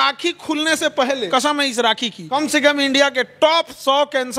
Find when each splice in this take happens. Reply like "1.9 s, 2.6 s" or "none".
1.3 s, 2.2 s